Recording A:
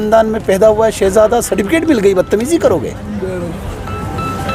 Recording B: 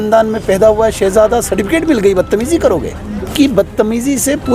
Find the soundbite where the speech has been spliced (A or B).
B